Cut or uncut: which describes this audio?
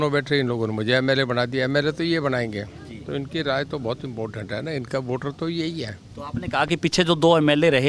uncut